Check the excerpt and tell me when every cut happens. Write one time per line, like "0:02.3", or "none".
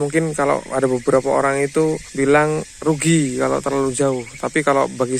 0:02.1